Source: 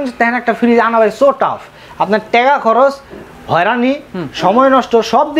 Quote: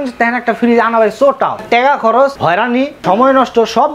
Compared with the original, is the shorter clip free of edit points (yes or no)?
no